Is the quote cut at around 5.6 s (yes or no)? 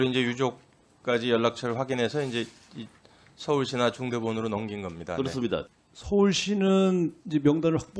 yes